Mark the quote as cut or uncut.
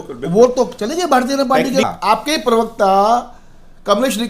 cut